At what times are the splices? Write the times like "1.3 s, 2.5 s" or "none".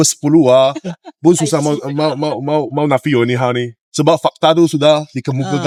none